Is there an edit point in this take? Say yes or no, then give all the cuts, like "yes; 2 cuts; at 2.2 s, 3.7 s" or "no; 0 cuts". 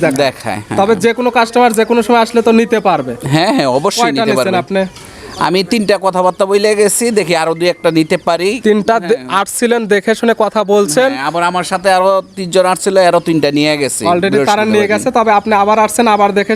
no; 0 cuts